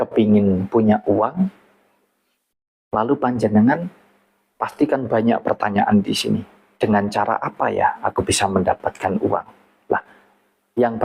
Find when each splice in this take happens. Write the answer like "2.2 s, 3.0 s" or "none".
6.6 s